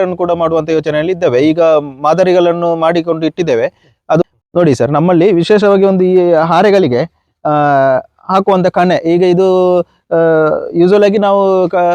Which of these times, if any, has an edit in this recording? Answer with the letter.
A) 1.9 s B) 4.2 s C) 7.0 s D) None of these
B